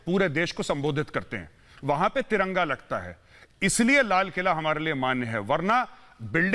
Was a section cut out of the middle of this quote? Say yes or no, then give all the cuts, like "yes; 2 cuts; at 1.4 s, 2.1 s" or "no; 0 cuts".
no; 0 cuts